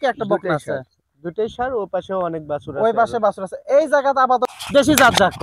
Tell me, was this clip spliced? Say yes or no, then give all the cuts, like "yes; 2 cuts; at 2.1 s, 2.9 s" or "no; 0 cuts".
yes; 1 cut; at 4.5 s